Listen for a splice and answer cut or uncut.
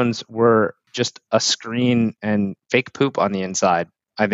cut